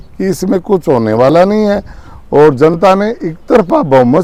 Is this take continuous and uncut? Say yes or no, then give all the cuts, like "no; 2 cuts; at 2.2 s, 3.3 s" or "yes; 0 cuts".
yes; 0 cuts